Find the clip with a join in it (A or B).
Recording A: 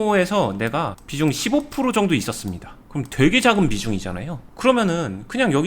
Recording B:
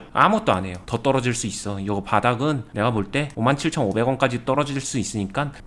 A